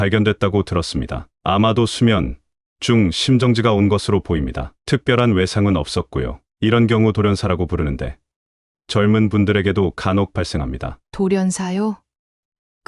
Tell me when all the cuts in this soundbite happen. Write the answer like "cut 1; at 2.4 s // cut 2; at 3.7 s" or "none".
none